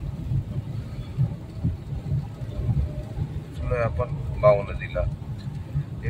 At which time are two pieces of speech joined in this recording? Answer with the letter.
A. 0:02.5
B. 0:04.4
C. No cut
A